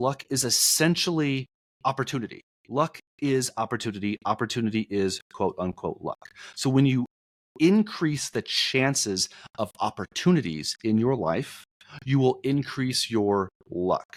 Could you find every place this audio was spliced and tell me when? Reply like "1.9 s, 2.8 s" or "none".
none